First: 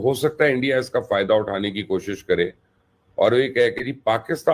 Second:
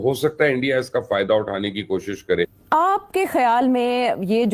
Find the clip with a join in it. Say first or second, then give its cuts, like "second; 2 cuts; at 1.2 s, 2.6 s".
second; 1 cut; at 2.6 s